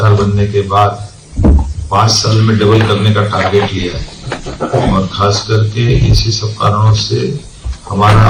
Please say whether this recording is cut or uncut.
uncut